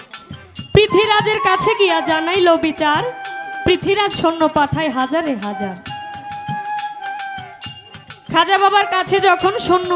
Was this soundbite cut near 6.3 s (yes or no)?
no